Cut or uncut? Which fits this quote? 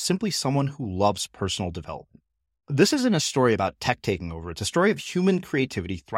uncut